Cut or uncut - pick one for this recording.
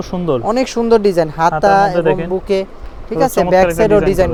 uncut